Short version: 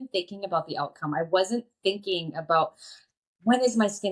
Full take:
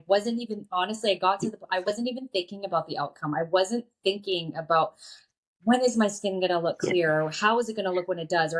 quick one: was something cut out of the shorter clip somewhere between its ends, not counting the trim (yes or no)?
no